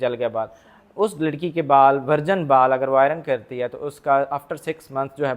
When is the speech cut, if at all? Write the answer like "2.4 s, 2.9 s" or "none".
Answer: none